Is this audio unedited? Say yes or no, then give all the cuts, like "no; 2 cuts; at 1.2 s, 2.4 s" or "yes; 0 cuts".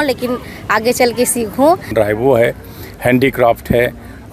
no; 1 cut; at 1.9 s